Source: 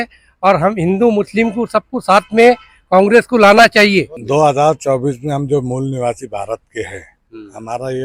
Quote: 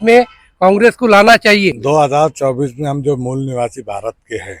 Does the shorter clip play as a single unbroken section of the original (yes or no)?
no